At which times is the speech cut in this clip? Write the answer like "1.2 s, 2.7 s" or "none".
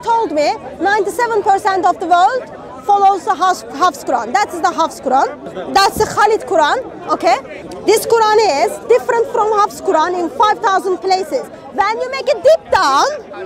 5.5 s, 7.5 s